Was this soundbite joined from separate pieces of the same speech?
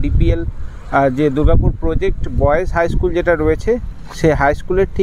no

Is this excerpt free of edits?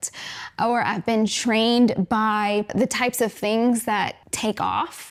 yes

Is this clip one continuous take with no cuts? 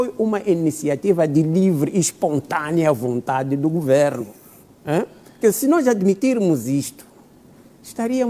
yes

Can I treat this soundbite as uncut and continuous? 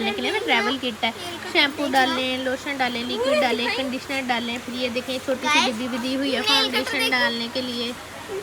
yes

